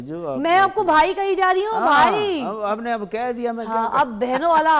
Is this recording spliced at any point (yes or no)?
no